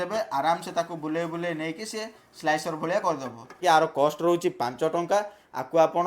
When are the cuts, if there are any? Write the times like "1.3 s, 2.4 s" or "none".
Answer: 3.6 s

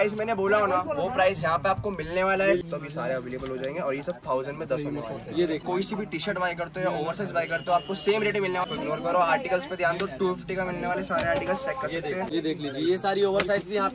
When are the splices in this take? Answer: 2.6 s, 5.6 s, 8.7 s, 12.3 s

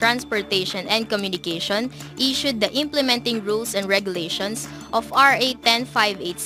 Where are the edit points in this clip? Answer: none

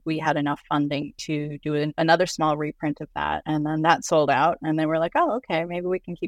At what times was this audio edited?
1.9 s, 3.4 s

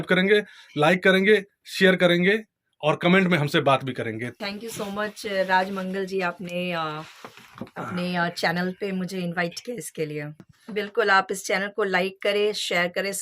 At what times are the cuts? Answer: 4.4 s, 10.6 s

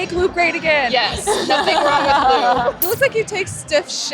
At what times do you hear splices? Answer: 2.8 s

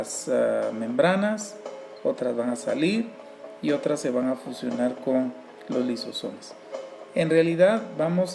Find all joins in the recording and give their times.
4.3 s

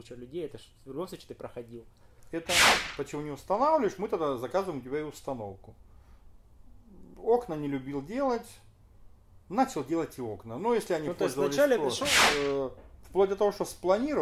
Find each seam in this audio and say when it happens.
2.6 s, 12.1 s

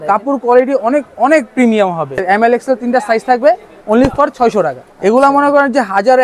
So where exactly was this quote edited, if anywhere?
2.2 s, 4.8 s

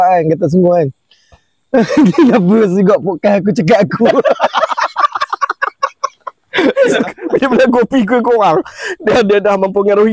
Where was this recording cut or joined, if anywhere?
6.9 s

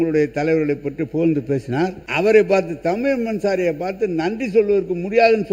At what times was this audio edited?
2.0 s

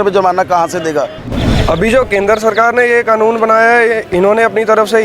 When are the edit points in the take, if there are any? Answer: 1.3 s

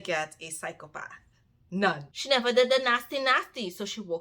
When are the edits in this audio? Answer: 2.1 s

